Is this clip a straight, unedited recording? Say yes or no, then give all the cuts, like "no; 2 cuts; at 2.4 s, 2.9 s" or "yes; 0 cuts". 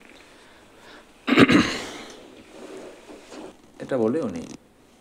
no; 1 cut; at 3.5 s